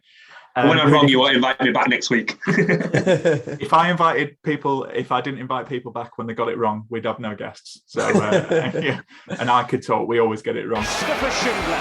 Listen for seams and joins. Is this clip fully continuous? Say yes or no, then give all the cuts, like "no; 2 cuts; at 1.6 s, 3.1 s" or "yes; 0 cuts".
no; 1 cut; at 10.9 s